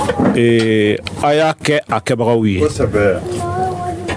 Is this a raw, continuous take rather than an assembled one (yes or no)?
yes